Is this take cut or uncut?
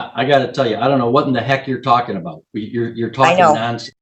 uncut